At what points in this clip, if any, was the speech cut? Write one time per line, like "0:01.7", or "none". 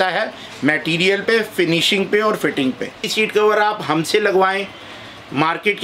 0:03.1

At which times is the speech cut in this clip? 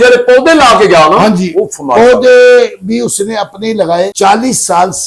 0:04.1

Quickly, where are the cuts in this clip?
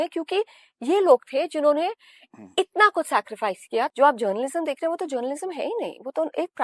0:03.9

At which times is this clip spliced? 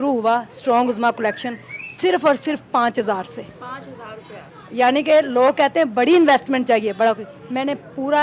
none

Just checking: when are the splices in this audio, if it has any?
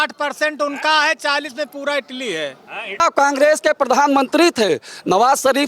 0:03.0

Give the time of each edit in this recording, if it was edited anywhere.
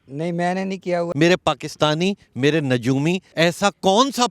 0:01.1
0:03.3

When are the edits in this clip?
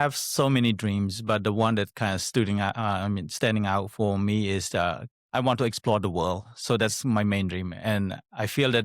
none

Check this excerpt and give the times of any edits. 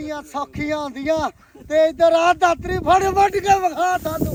none

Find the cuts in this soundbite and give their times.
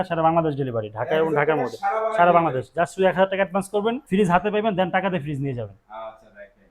none

